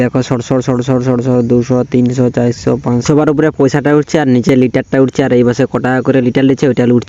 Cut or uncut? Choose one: uncut